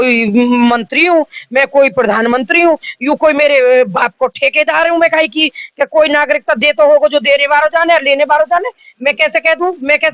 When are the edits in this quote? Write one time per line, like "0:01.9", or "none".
none